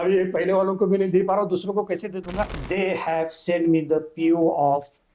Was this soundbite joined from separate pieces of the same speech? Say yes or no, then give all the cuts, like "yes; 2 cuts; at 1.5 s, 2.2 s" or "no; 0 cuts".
yes; 1 cut; at 2.6 s